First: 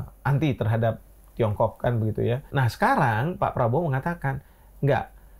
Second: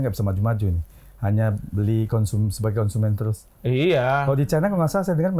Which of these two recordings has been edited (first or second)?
first